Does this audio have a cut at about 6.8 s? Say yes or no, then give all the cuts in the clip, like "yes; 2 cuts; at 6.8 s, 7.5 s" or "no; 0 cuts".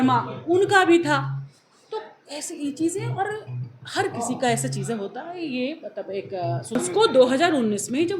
yes; 1 cut; at 6.8 s